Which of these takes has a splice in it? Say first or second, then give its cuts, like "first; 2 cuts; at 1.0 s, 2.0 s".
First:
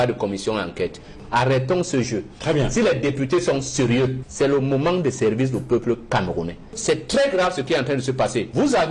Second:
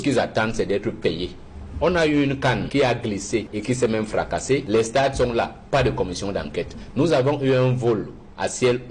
first; 3 cuts; at 1.1 s, 4.2 s, 6.7 s